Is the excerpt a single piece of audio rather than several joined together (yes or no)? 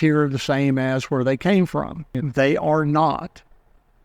no